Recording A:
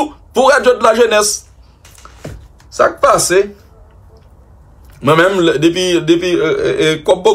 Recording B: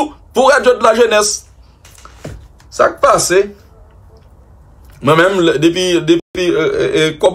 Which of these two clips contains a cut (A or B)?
A